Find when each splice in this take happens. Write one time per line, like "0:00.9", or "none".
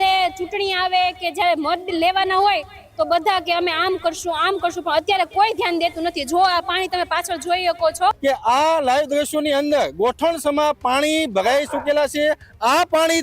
0:08.2